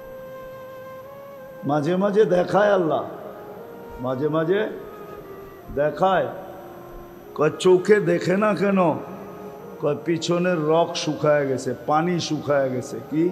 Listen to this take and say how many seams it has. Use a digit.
1